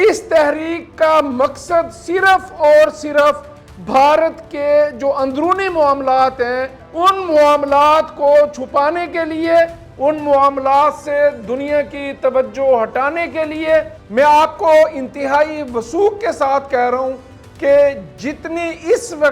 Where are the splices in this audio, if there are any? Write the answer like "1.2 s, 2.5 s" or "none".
6.8 s, 14.0 s